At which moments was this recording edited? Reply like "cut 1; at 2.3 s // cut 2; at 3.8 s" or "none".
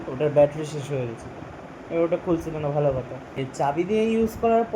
cut 1; at 3.4 s